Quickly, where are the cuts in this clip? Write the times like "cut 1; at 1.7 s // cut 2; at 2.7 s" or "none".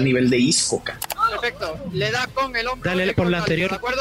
cut 1; at 1.0 s